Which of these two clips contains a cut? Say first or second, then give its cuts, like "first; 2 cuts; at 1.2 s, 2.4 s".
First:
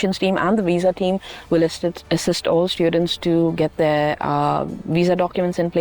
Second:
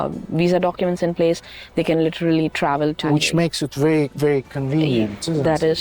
second; 1 cut; at 3.1 s